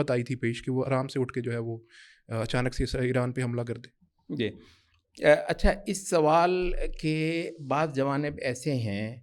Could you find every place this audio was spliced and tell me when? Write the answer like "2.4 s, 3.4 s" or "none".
none